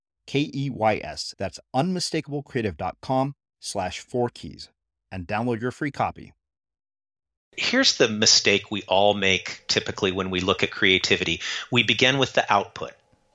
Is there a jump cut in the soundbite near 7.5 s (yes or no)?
yes